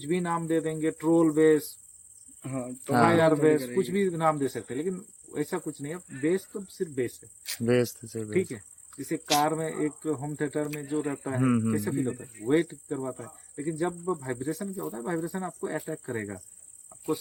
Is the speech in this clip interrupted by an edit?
no; 0 cuts

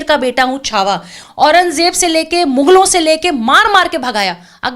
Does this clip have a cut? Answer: yes; 1 cut; at 1.2 s

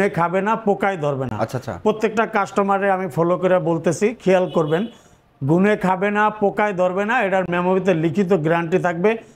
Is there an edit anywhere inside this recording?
no; 0 cuts

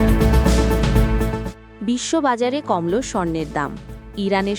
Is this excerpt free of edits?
yes; 0 cuts

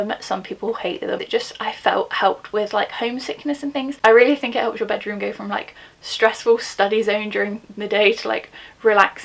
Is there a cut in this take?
yes; 2 cuts; at 1.2 s, 3.9 s

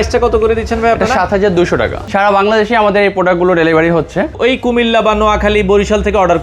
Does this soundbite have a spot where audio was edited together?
yes; 2 cuts; at 2.0 s, 4.3 s

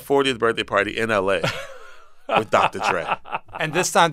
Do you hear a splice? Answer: no; 0 cuts

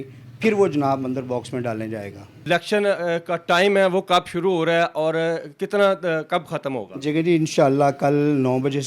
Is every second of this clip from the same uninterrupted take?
yes; 0 cuts

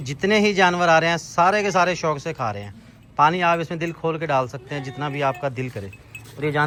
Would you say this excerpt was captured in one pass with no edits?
yes; 0 cuts

